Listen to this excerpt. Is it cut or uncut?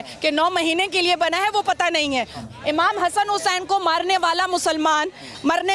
cut